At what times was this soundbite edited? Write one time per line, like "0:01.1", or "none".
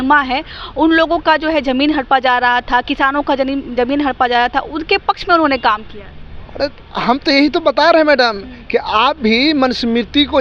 none